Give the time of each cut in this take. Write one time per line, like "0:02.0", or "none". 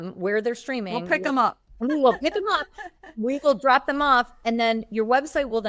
0:01.7